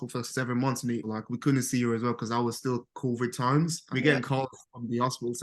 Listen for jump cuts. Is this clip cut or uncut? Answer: cut